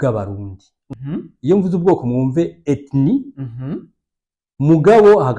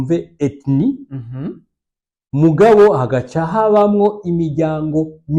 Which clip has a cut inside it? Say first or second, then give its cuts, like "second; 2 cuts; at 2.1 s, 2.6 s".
first; 1 cut; at 0.9 s